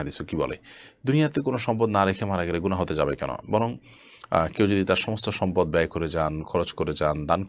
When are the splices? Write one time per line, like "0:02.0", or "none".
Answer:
none